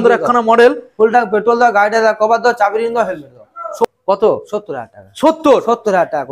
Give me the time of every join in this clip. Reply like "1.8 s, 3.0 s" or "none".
3.9 s